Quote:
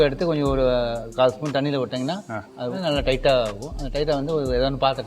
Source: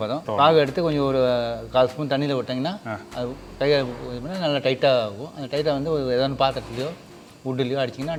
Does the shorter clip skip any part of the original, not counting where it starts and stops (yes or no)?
yes